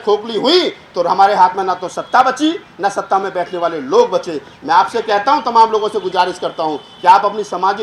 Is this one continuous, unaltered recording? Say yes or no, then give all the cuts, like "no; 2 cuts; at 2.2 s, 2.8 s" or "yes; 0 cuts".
yes; 0 cuts